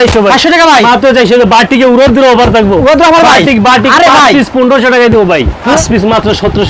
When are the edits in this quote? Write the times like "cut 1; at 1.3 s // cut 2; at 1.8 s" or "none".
cut 1; at 5.8 s